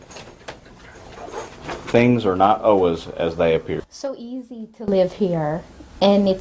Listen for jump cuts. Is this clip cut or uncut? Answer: cut